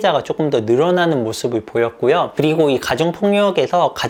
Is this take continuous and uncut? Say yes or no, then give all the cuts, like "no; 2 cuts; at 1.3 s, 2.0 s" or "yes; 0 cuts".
yes; 0 cuts